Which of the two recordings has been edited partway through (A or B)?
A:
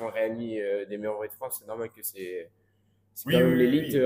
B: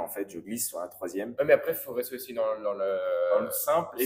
B